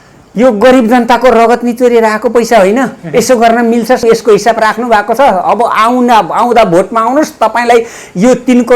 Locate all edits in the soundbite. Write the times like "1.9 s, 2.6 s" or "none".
4.0 s